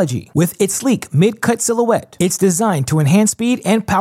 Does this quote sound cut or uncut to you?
uncut